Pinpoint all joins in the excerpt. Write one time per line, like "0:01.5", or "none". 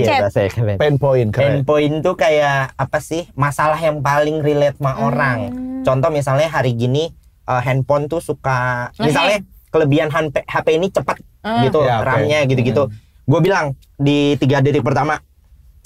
none